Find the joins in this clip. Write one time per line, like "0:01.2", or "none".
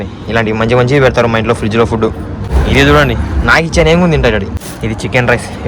0:02.5
0:04.6